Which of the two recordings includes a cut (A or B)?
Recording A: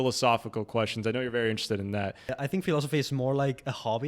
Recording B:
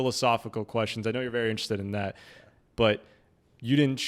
A